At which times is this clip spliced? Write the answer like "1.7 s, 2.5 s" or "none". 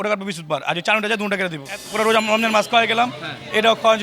1.8 s